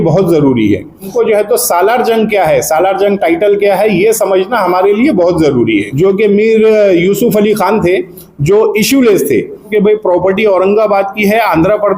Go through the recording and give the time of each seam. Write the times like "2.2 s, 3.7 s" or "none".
1.1 s, 5.9 s, 9.7 s